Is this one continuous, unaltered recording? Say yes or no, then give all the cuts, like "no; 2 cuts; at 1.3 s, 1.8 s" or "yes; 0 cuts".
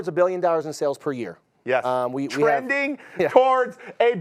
yes; 0 cuts